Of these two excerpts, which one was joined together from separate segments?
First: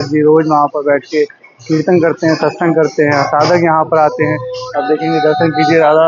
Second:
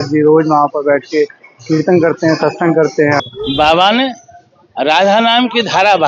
second; 1 cut; at 3.2 s

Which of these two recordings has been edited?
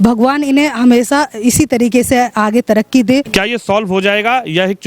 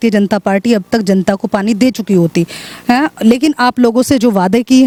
first; 1 cut; at 3.3 s

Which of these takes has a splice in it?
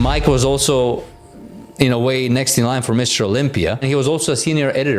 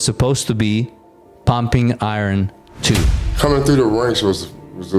second; 1 cut; at 3.2 s

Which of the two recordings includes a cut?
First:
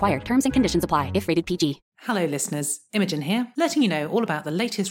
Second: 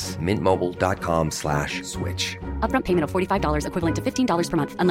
first; 1 cut; at 1.9 s

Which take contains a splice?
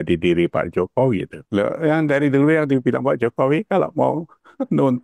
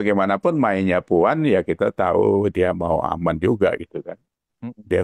first; 1 cut; at 1.3 s

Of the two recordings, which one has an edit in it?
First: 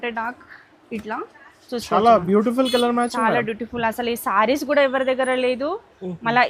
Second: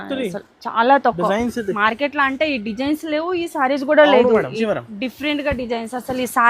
second; 1 cut; at 4.6 s

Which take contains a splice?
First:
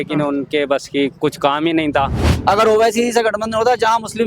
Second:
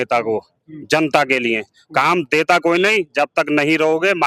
first; 1 cut; at 2.2 s

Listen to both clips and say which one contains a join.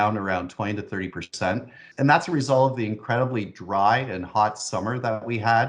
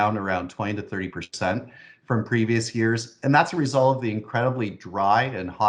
first; 1 cut; at 1.8 s

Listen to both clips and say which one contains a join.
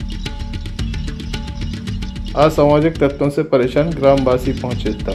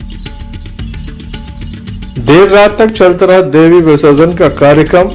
second; 1 cut; at 2.1 s

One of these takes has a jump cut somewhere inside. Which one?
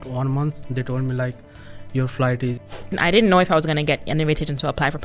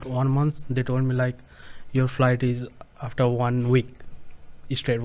first; 1 cut; at 3.0 s

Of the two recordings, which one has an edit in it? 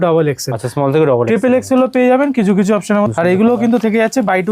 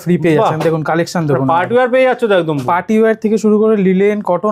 first; 1 cut; at 3.1 s

